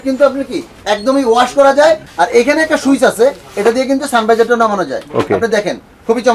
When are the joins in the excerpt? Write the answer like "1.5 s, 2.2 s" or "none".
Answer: 2.1 s

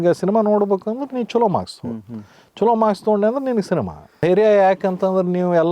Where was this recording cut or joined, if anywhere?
4.0 s

